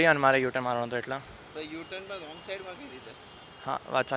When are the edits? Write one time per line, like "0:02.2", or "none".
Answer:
none